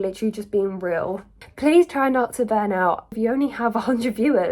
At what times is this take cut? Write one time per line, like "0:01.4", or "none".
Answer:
0:01.4
0:03.1